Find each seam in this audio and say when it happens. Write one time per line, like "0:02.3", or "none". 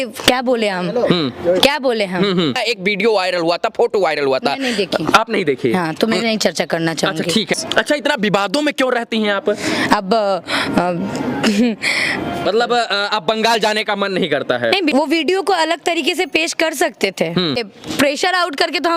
0:02.6
0:07.6
0:12.4
0:14.9
0:17.7